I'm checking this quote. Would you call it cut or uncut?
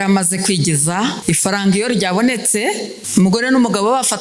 cut